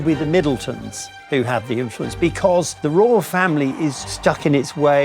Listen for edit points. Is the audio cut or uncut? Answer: cut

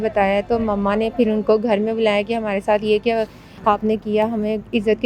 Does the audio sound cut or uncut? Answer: uncut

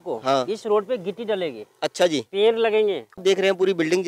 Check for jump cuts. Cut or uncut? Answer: cut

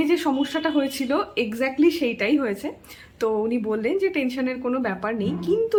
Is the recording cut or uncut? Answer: uncut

